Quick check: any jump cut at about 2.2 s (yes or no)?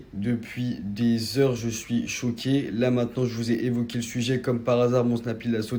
no